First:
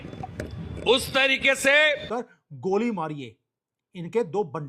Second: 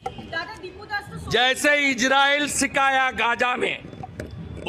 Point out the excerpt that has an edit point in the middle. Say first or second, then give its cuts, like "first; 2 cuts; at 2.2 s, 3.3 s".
first; 1 cut; at 2.1 s